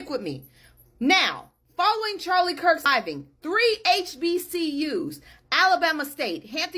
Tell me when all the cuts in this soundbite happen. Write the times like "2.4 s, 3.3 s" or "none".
2.9 s